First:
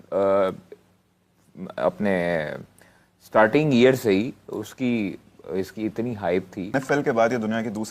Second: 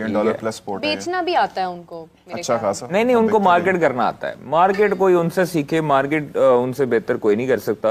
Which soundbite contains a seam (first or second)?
first